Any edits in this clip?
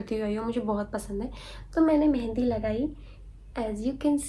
no; 0 cuts

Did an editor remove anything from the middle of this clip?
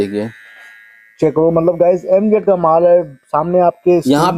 no; 0 cuts

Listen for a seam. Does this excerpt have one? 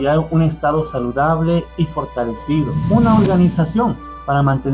yes; 1 cut; at 2.8 s

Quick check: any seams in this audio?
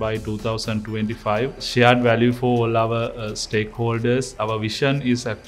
yes; 2 cuts; at 1.6 s, 4.3 s

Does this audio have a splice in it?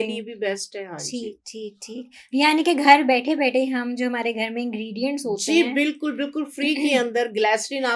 no; 0 cuts

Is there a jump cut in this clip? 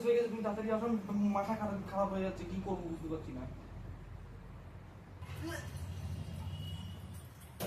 yes; 1 cut; at 5.2 s

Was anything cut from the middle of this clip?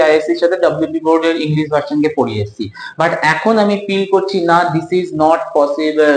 no; 0 cuts

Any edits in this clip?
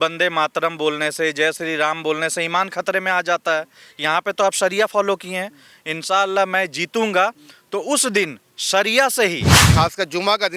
yes; 1 cut; at 9.6 s

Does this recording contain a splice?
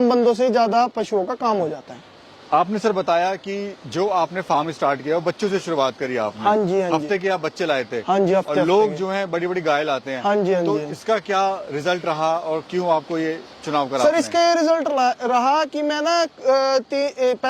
no; 0 cuts

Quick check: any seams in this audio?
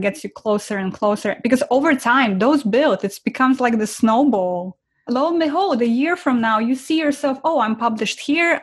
no; 0 cuts

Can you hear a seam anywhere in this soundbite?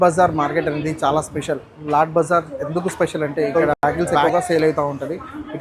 no; 0 cuts

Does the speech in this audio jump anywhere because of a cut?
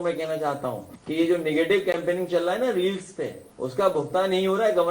yes; 2 cuts; at 0.9 s, 3.4 s

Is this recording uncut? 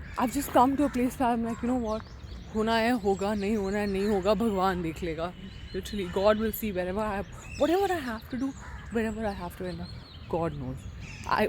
yes; 0 cuts

